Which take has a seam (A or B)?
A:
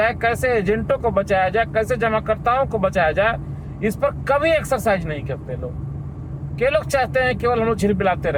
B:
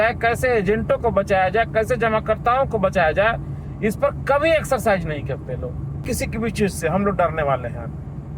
B